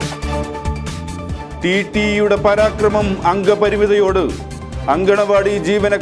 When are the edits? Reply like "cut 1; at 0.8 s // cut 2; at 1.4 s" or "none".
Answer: cut 1; at 1.0 s